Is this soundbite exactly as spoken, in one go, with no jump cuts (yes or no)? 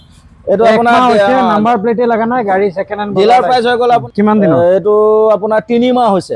no